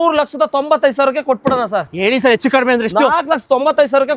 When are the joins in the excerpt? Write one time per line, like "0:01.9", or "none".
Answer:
0:01.9